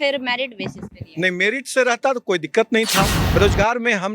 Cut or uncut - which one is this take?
cut